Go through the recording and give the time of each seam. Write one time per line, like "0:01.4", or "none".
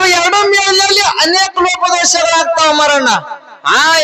none